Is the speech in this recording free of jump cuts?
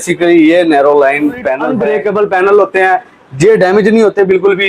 no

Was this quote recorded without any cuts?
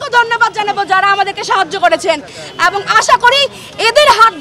yes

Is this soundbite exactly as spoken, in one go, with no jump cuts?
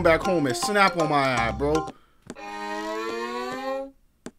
yes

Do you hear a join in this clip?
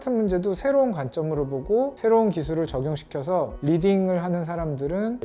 no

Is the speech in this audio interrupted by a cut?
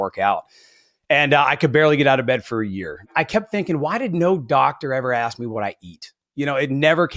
yes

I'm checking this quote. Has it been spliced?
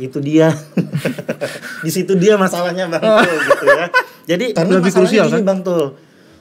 yes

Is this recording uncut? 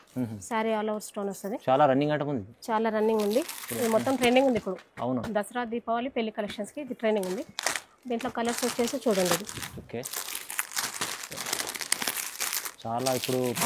yes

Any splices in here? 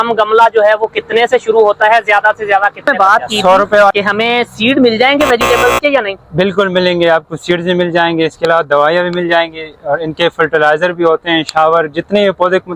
yes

